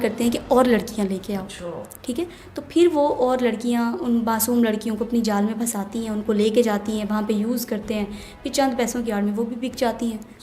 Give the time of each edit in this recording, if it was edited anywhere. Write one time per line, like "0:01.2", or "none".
none